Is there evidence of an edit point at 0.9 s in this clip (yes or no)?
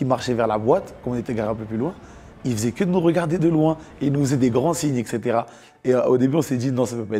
no